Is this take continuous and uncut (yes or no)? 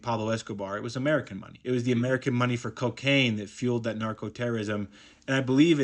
yes